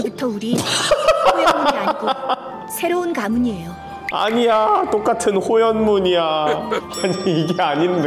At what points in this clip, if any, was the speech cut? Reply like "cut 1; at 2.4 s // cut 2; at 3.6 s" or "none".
cut 1; at 6.9 s

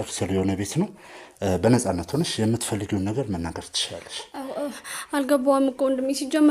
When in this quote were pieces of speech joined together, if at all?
none

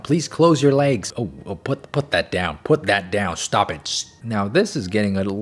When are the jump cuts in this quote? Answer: cut 1; at 1.0 s // cut 2; at 4.1 s

